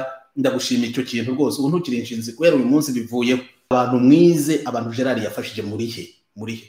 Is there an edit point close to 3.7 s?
yes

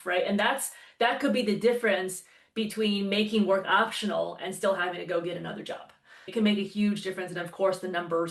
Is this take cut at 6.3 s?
yes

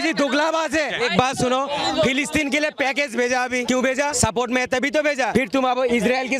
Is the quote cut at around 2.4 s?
no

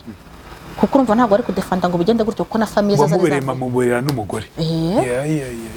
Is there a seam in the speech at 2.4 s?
no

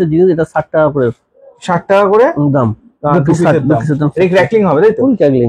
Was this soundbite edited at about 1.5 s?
no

